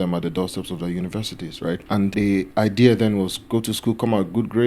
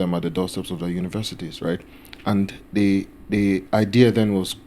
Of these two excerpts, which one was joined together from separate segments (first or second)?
first